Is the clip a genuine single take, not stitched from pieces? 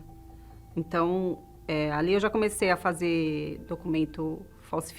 yes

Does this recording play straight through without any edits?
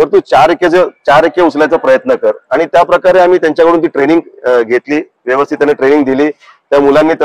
yes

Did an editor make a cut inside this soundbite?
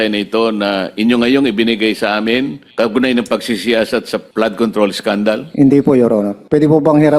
yes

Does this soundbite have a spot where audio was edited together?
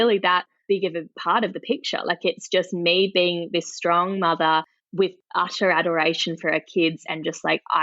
yes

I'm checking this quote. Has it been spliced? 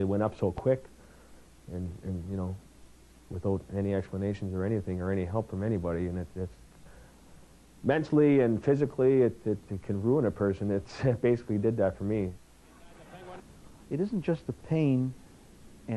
yes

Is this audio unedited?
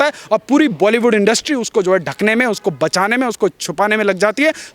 yes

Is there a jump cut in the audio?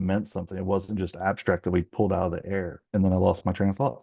no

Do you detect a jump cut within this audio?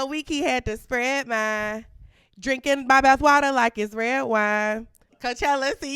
no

